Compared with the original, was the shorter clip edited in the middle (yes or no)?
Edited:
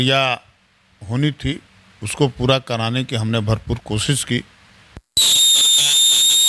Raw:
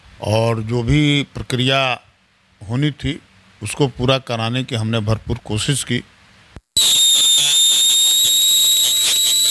no